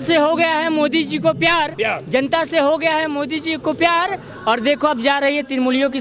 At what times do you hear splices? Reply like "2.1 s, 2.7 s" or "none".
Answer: none